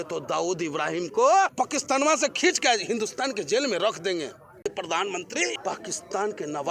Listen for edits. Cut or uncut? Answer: cut